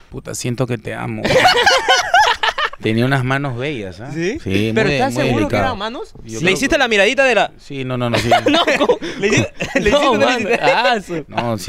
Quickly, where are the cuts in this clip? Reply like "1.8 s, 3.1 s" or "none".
none